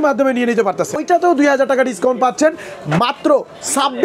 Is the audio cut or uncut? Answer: cut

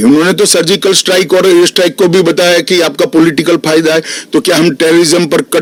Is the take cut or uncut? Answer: uncut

